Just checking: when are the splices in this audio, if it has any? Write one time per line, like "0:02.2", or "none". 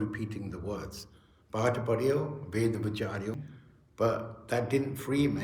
0:03.4